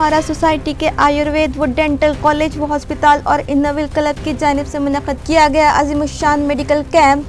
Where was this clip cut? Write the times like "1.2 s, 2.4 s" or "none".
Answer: none